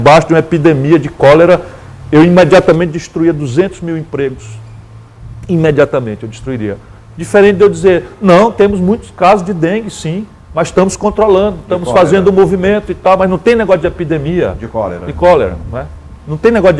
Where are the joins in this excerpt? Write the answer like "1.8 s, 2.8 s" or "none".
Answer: none